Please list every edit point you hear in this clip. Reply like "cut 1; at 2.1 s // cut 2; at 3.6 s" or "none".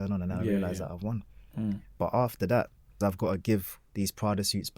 cut 1; at 2.8 s